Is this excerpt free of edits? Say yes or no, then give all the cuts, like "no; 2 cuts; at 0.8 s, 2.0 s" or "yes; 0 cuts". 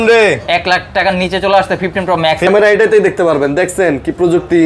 no; 1 cut; at 2.5 s